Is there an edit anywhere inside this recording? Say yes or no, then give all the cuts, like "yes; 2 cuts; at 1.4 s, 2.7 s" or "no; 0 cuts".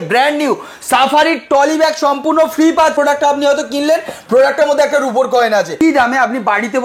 yes; 2 cuts; at 2.9 s, 5.8 s